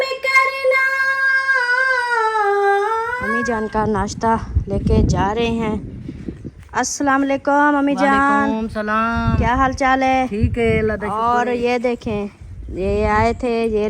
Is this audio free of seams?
no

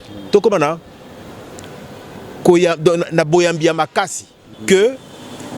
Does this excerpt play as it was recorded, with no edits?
no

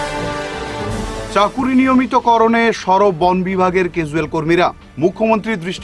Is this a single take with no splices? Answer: yes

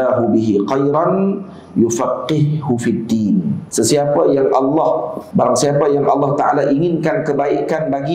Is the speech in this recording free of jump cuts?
no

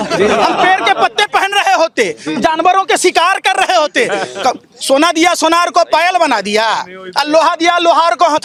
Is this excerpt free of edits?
yes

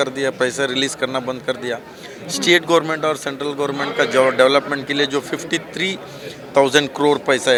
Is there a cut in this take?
no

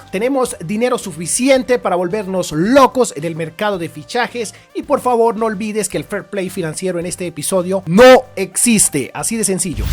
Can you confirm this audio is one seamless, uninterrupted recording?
yes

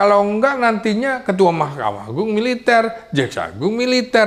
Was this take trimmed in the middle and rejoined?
no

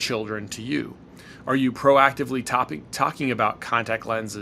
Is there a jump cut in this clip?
no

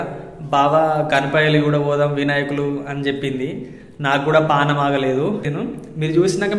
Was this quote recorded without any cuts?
no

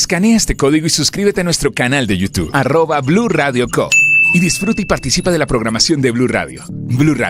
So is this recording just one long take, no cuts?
yes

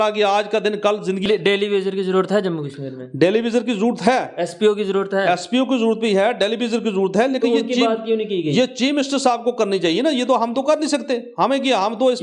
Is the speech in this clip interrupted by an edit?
yes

